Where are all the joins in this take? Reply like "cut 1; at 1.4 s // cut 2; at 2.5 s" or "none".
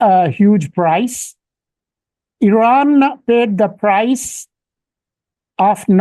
none